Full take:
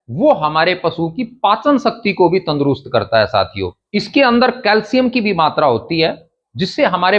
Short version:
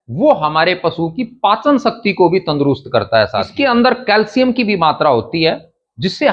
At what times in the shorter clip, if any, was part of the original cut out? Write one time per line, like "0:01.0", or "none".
0:03.4